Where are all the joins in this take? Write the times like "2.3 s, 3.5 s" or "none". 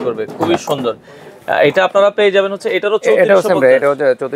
none